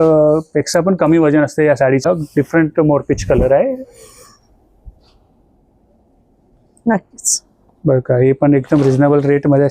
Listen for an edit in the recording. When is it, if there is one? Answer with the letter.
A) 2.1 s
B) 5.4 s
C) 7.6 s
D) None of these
A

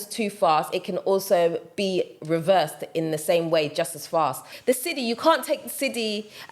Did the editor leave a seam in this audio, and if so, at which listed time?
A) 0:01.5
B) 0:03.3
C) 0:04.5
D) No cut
C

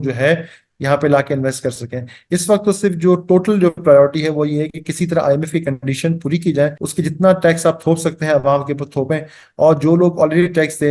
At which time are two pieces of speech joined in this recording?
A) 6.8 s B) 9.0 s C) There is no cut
A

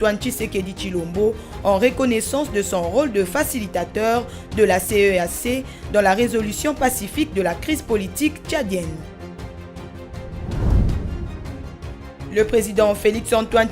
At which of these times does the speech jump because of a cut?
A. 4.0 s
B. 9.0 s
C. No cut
B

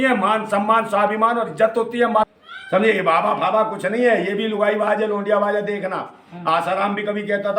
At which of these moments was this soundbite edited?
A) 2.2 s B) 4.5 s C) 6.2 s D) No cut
A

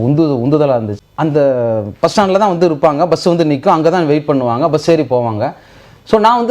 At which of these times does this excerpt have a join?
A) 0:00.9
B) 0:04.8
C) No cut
A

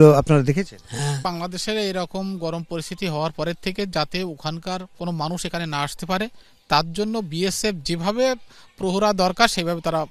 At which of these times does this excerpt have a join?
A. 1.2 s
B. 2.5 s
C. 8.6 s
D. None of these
A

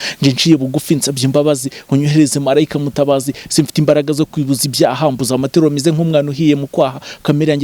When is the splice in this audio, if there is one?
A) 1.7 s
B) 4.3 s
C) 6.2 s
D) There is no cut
D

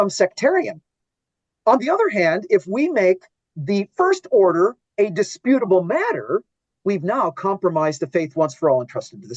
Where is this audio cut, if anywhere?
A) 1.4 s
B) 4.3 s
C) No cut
C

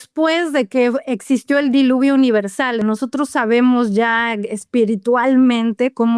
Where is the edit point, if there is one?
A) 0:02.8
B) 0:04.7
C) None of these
A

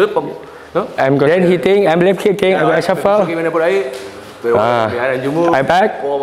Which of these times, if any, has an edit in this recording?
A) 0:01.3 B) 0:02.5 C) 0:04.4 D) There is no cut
A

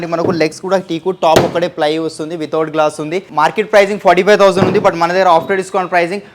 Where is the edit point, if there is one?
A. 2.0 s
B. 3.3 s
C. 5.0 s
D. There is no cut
D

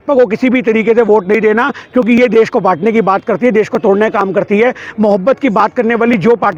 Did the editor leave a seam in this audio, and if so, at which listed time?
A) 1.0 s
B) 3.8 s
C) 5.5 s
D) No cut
D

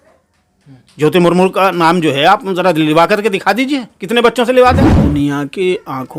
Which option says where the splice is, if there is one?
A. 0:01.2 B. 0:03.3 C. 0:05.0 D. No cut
C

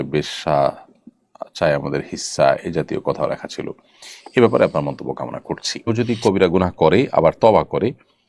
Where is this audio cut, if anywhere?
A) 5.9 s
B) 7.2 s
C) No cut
A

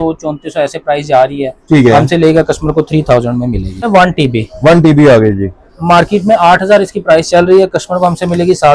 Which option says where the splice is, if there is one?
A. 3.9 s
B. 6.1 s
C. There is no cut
A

